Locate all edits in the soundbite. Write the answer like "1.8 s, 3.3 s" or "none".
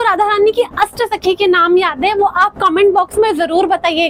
none